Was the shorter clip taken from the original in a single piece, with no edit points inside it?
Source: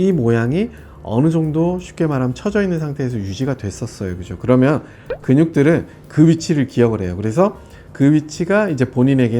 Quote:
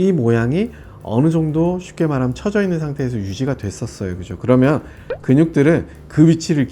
yes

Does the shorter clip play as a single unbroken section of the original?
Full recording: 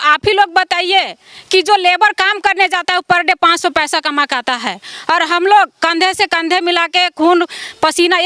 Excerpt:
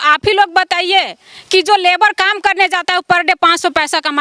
yes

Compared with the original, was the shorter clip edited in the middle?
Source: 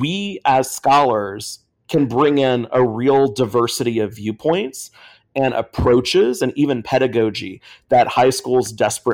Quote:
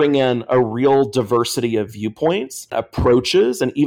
yes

